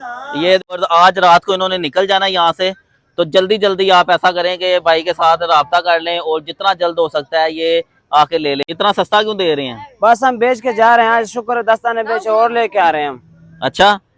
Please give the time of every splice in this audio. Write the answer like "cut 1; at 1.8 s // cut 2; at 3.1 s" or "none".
cut 1; at 0.8 s // cut 2; at 8.7 s